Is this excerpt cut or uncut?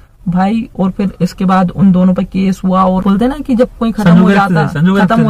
cut